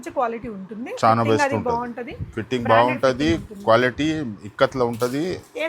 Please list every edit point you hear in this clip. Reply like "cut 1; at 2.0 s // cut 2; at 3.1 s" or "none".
none